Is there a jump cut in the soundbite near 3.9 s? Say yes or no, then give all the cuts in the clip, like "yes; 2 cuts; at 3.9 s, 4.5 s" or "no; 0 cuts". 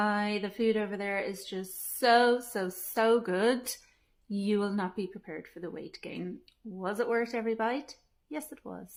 no; 0 cuts